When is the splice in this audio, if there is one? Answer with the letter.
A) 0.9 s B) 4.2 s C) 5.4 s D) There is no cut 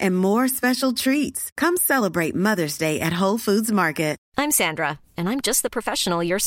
B